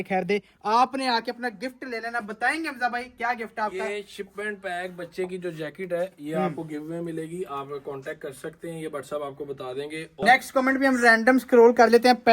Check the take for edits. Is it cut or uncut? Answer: cut